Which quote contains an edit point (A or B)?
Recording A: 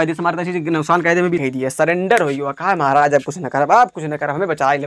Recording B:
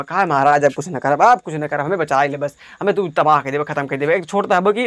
A